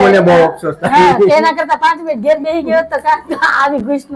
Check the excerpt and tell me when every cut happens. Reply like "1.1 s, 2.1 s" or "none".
none